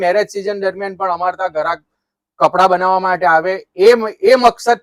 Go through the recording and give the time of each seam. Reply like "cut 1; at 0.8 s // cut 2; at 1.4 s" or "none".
none